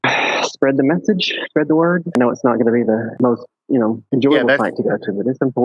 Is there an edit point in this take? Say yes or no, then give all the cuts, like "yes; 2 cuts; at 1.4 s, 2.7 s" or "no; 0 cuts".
no; 0 cuts